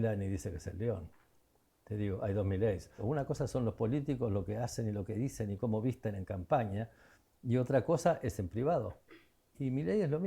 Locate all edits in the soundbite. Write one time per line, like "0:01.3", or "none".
0:03.0